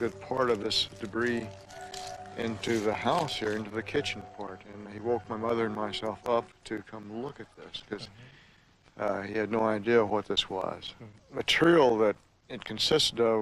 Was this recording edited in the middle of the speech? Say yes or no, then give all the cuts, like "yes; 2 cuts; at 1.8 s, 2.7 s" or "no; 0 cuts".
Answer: yes; 1 cut; at 3.0 s